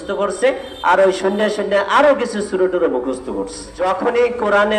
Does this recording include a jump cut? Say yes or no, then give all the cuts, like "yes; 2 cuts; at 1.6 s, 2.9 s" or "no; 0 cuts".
yes; 1 cut; at 3.6 s